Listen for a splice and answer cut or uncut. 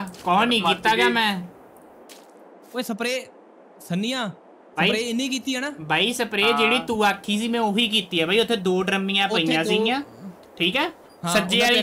uncut